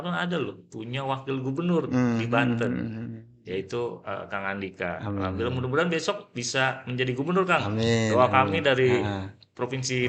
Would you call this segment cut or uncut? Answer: uncut